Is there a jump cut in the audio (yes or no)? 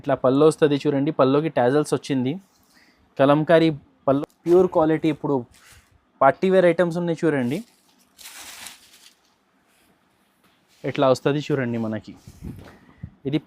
yes